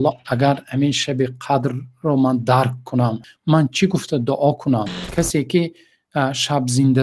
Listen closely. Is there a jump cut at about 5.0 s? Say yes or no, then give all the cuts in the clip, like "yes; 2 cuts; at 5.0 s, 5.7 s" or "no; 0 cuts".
yes; 2 cuts; at 3.2 s, 5.0 s